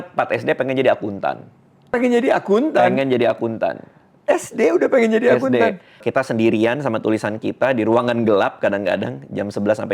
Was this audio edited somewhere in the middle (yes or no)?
yes